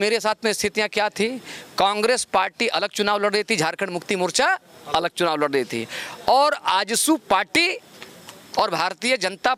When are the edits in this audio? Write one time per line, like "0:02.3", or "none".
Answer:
none